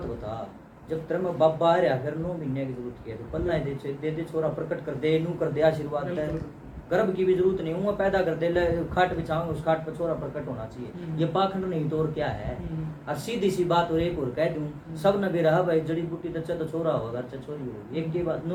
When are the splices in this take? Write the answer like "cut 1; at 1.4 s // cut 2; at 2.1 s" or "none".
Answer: none